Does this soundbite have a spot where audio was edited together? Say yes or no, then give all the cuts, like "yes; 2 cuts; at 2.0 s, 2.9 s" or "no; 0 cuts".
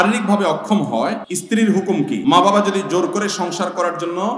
yes; 2 cuts; at 1.3 s, 2.2 s